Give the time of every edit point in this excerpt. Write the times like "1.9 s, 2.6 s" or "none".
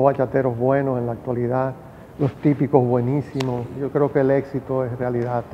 3.7 s